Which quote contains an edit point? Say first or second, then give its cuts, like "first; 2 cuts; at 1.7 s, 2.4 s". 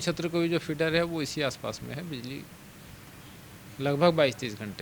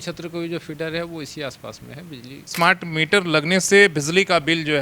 second; 1 cut; at 2.5 s